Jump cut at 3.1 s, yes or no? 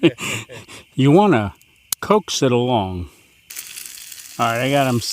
yes